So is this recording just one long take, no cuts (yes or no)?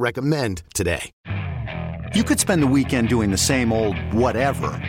no